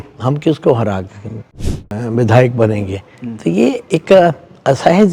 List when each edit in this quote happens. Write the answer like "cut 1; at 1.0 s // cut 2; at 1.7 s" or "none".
cut 1; at 1.7 s